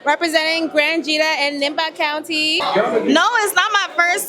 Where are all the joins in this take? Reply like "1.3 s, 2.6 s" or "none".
2.6 s